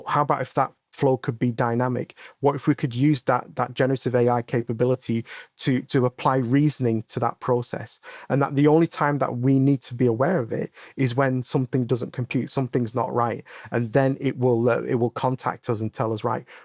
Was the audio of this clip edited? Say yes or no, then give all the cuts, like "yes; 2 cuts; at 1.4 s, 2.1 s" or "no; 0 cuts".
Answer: no; 0 cuts